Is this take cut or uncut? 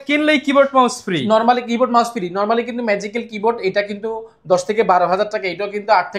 uncut